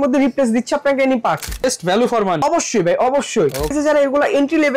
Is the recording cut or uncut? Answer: cut